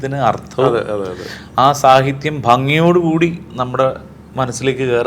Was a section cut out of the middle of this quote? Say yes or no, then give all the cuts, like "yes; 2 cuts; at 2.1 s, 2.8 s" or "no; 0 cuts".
no; 0 cuts